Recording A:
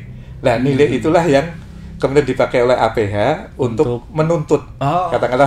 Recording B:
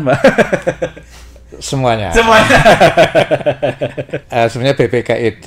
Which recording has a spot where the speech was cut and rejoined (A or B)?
B